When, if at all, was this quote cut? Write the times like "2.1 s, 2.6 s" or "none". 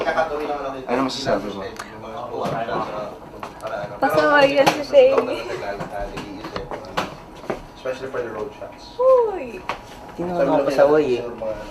2.8 s